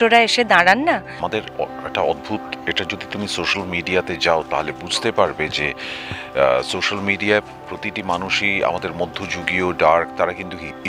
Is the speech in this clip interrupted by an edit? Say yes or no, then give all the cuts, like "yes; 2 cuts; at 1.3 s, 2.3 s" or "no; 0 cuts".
yes; 1 cut; at 1.2 s